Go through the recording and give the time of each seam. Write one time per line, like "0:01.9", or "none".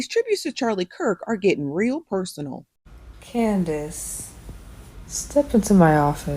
0:02.8